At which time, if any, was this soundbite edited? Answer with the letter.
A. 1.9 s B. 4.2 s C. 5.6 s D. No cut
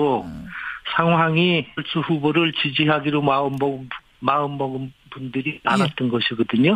D